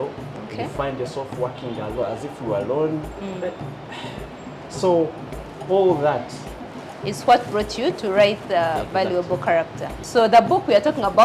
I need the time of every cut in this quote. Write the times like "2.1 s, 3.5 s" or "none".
9.9 s